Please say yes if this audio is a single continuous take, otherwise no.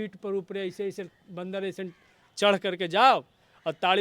yes